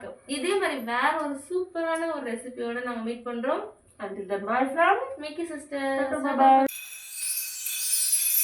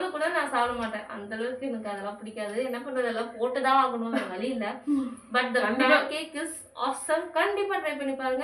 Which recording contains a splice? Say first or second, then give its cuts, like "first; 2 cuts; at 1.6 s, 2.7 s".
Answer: first; 1 cut; at 6.7 s